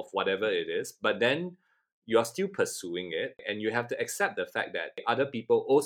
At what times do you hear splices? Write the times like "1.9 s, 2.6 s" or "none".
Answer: 3.4 s, 5.0 s